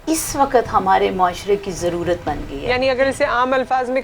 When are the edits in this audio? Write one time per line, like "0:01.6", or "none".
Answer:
0:02.5

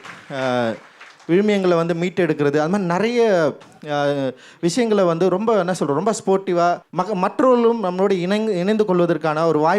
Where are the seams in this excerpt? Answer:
0:06.9

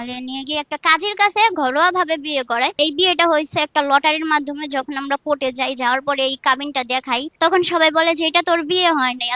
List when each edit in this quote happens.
0:02.8
0:07.3

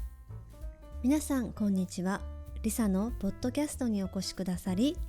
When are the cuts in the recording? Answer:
0:01.0

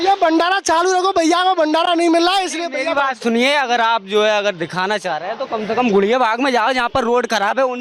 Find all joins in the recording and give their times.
none

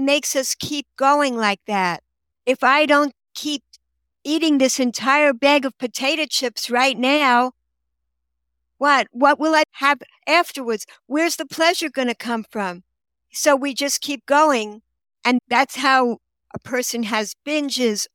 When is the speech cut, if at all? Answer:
0:09.7
0:15.4

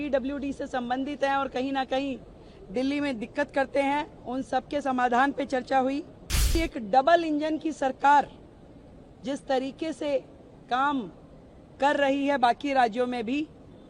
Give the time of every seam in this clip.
0:06.6

